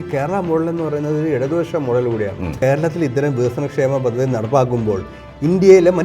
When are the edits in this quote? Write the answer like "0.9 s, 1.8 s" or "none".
2.5 s